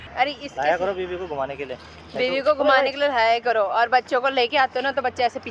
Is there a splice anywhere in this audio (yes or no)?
no